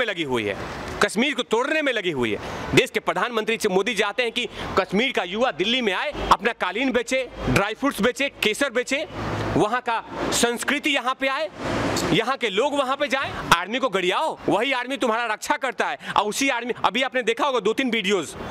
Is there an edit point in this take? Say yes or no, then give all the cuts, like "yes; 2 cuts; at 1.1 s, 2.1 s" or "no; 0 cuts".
yes; 3 cuts; at 6.2 s, 13.3 s, 14.4 s